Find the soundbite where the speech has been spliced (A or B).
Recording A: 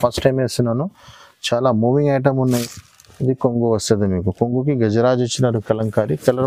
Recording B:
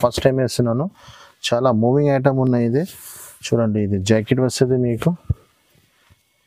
A